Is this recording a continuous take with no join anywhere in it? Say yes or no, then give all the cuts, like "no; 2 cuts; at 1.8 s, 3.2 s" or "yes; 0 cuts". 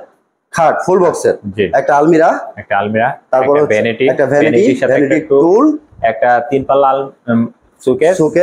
yes; 0 cuts